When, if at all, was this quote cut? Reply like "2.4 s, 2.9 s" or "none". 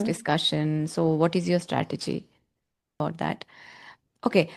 3.0 s